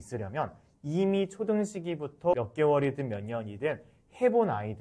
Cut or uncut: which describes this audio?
cut